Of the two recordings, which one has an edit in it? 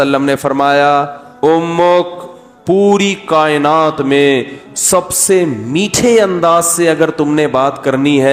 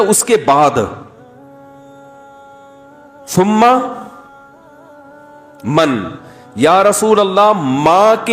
second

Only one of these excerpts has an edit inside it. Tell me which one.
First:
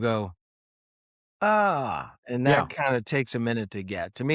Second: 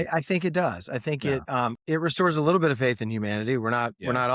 second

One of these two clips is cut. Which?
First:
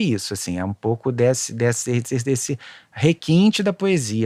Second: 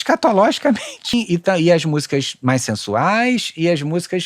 second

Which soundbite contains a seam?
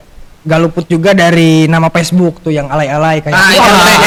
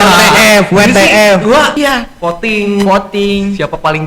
second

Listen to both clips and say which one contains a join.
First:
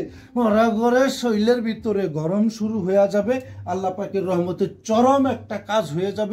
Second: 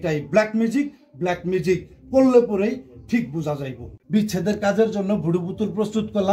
second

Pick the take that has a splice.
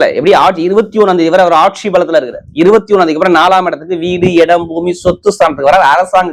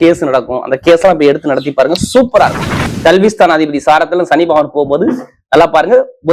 second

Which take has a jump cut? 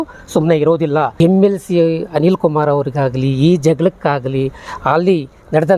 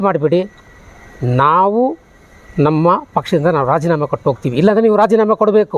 first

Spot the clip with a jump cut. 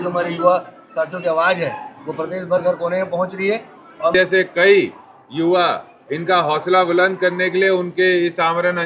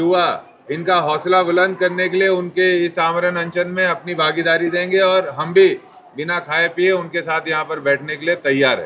first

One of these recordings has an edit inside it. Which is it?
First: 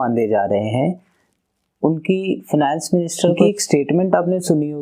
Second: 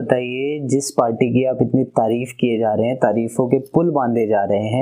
first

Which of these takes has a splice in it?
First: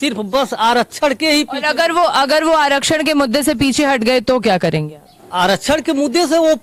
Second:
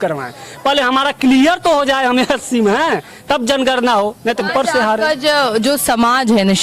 second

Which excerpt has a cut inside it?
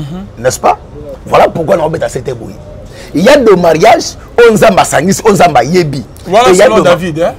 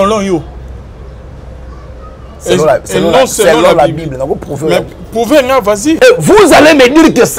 second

